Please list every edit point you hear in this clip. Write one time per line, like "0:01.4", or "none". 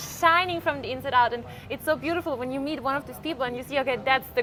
none